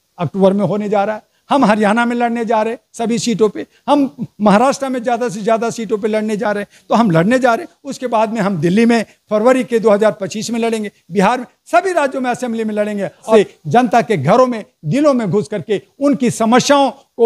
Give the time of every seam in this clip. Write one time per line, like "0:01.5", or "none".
0:13.3